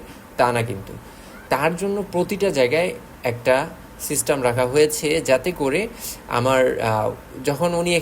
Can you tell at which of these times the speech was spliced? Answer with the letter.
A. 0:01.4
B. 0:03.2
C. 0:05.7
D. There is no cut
A